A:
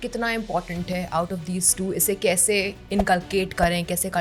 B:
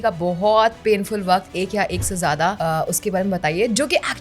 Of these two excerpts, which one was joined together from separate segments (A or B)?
B